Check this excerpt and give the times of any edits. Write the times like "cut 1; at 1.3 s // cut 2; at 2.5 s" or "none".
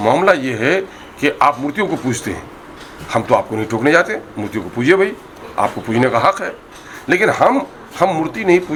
none